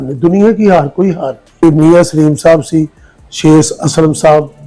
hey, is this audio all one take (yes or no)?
no